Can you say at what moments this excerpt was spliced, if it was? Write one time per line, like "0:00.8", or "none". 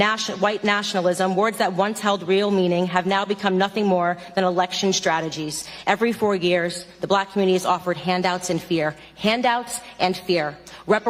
none